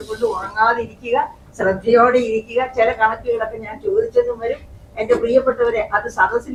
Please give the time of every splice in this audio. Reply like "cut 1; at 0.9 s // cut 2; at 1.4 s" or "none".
none

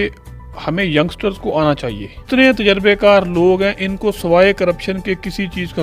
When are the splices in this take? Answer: cut 1; at 2.2 s

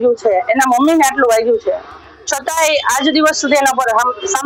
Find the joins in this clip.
none

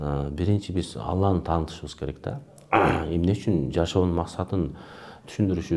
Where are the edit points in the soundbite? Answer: none

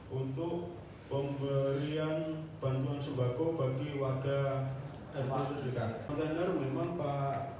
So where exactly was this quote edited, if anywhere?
cut 1; at 6.1 s

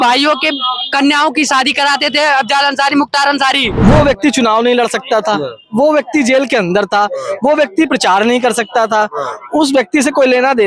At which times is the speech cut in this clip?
cut 1; at 3.7 s

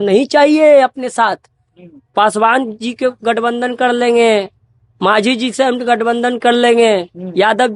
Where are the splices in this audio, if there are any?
none

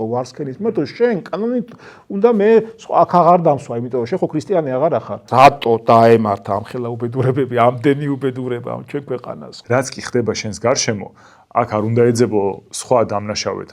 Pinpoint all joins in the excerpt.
cut 1; at 5.2 s // cut 2; at 9.5 s

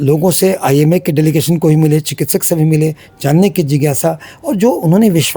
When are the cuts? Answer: none

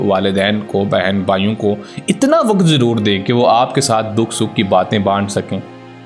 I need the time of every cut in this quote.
none

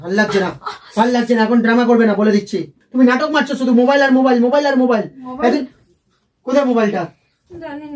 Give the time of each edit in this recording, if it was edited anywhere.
cut 1; at 2.8 s

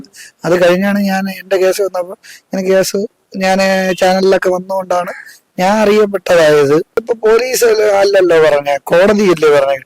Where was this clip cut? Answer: cut 1; at 7.0 s

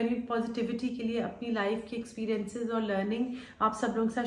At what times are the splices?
none

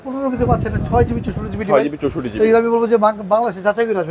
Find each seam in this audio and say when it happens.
none

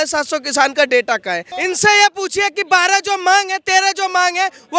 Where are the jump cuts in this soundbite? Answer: cut 1; at 1.5 s

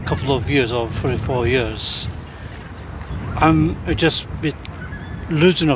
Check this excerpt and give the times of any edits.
none

